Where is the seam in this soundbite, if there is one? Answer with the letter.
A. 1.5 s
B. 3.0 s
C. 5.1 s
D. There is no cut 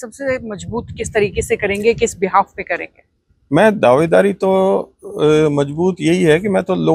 D